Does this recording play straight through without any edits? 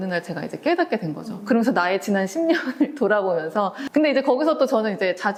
yes; 0 cuts

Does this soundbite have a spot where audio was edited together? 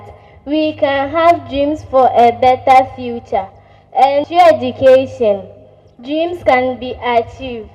no; 0 cuts

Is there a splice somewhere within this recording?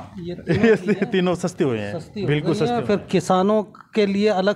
no; 0 cuts

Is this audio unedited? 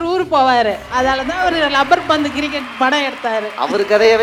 yes; 0 cuts

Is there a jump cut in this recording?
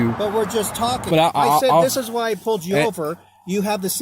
yes; 1 cut; at 1.1 s

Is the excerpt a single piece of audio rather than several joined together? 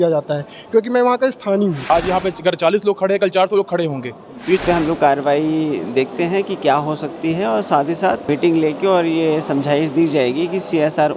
no; 3 cuts; at 1.8 s, 4.6 s, 8.2 s

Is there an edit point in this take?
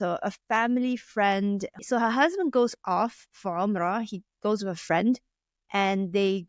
yes; 1 cut; at 1.8 s

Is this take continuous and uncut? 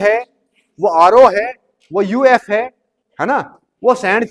yes; 0 cuts

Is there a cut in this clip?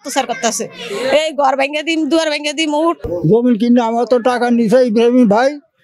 yes; 1 cut; at 3.1 s

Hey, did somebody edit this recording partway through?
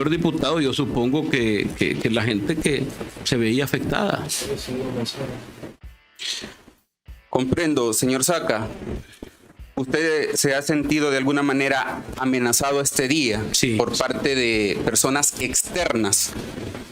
no; 0 cuts

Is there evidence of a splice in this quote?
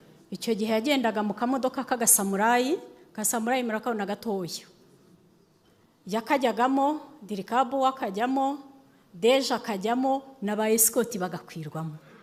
no; 0 cuts

